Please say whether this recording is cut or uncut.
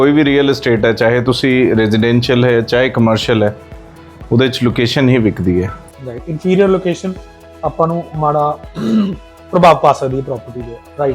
uncut